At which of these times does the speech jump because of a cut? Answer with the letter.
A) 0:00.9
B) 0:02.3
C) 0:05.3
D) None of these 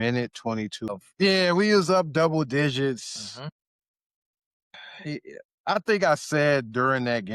A